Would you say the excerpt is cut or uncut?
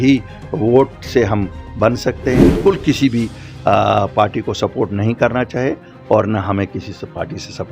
cut